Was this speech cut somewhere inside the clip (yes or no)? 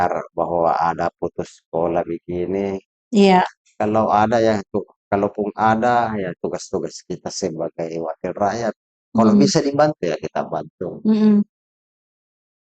no